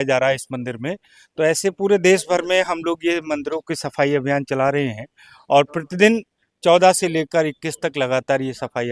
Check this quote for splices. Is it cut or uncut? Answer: uncut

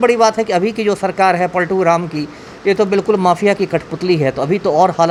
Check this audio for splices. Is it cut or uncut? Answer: uncut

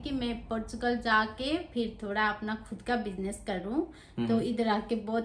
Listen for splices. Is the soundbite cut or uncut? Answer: uncut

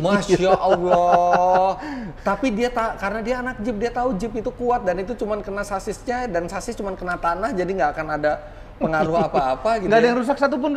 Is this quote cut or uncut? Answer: uncut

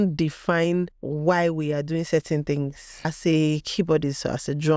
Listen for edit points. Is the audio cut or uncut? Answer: cut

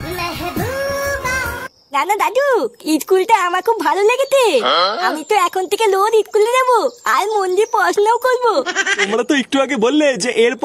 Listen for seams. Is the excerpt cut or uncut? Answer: cut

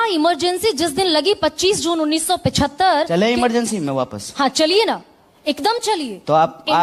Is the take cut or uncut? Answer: uncut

